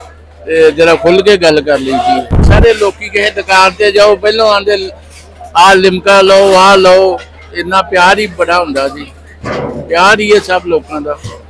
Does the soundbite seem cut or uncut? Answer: cut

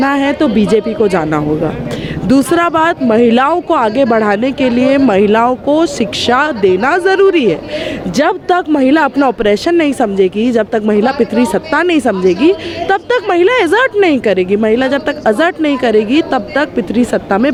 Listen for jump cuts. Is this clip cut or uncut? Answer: uncut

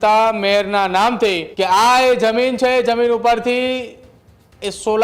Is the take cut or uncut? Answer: cut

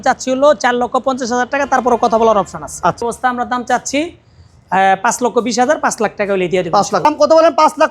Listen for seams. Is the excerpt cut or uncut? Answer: cut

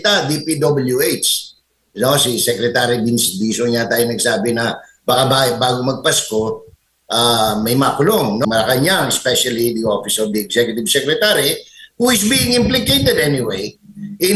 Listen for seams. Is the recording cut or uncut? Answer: cut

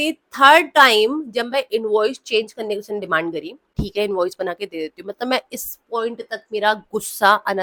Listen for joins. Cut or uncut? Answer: uncut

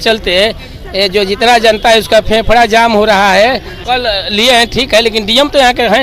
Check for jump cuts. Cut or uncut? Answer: cut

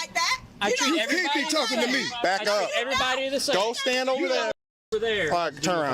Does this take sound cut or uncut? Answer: cut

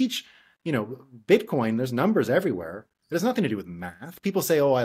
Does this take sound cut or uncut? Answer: uncut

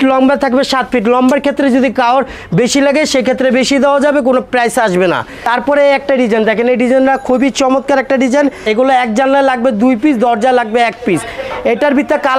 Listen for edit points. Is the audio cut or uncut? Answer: cut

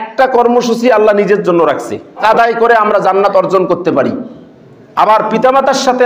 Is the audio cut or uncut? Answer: cut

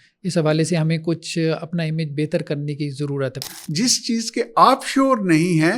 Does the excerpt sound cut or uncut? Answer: cut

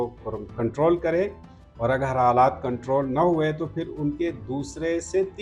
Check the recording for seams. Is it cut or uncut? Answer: uncut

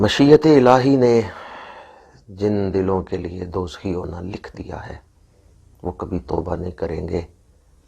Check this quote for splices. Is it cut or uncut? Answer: uncut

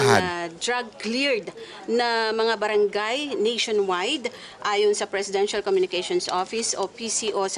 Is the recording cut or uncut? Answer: uncut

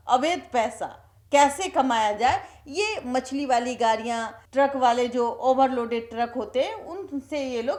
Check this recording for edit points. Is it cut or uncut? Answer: uncut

